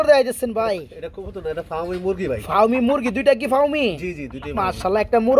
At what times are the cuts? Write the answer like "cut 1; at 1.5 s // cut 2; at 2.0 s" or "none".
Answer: none